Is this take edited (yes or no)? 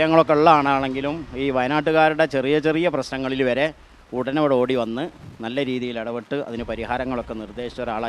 no